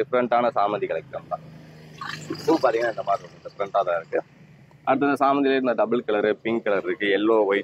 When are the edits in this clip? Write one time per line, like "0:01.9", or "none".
none

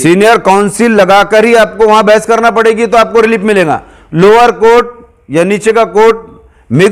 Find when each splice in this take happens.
none

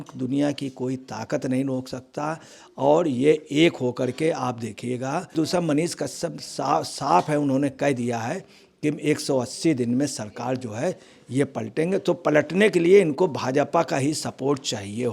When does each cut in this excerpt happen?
0:05.3

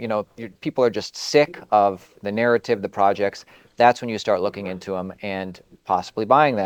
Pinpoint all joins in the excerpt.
none

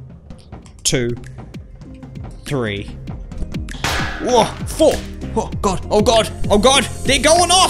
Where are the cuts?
none

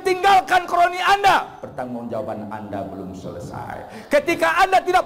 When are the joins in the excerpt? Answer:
none

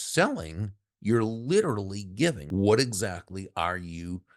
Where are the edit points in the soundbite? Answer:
0:02.4

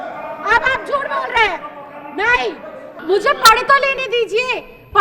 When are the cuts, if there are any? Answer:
0:02.9

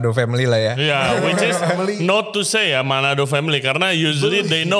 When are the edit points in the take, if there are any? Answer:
none

